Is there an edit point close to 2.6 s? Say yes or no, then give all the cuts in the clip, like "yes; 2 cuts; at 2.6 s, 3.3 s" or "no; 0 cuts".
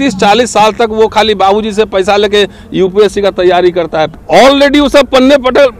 no; 1 cut; at 4.2 s